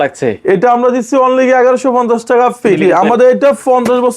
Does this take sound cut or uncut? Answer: cut